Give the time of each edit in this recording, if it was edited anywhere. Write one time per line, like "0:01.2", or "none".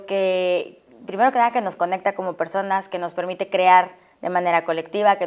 none